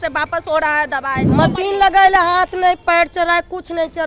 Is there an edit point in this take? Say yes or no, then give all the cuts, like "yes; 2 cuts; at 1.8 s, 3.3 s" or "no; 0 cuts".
yes; 1 cut; at 1.3 s